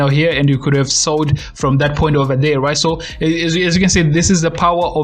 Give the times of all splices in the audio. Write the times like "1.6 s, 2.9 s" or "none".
none